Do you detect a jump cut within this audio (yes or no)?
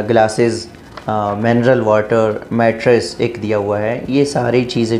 no